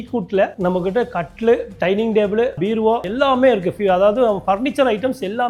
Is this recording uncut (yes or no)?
yes